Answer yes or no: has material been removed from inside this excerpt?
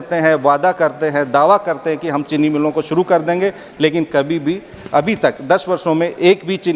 no